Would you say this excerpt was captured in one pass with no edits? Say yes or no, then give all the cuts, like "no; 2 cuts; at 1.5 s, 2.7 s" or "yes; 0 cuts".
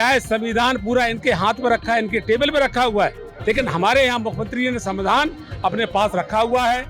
no; 1 cut; at 3.3 s